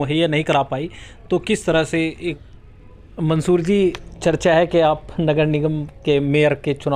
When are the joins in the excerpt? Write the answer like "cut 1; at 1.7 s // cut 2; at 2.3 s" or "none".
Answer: cut 1; at 2.3 s